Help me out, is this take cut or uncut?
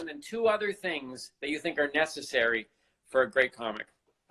uncut